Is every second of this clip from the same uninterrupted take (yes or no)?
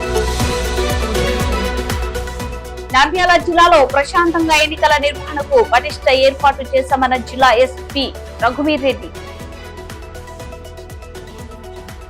yes